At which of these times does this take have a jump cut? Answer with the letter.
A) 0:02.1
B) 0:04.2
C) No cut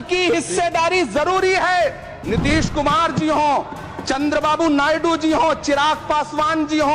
A